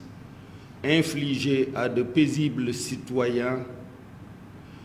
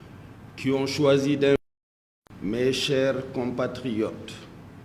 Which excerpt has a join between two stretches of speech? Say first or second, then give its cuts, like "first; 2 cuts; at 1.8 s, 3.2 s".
second; 1 cut; at 1.6 s